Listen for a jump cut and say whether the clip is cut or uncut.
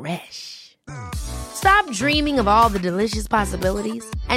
uncut